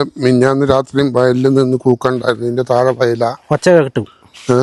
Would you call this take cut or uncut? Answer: uncut